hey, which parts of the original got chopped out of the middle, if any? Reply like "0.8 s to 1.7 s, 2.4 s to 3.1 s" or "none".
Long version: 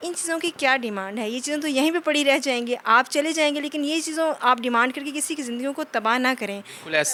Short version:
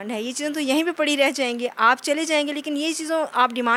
none